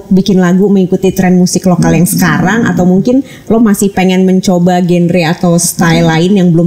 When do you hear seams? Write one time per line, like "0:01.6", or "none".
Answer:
none